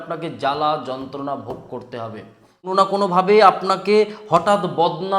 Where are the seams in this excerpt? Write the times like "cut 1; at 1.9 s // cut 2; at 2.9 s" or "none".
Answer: cut 1; at 2.7 s